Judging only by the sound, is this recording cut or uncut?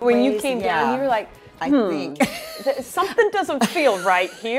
uncut